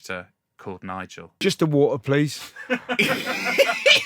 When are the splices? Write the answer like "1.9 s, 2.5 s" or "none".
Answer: 1.4 s

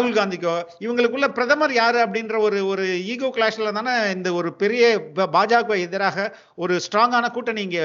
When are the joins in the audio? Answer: none

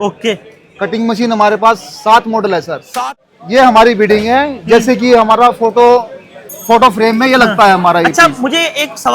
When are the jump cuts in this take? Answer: 2.8 s

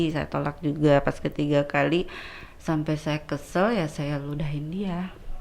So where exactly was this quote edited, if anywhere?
none

